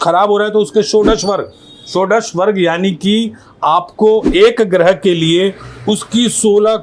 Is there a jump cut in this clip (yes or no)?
no